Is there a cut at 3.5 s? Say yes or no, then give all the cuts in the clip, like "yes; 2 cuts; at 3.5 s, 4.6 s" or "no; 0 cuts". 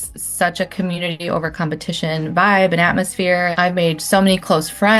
yes; 1 cut; at 3.5 s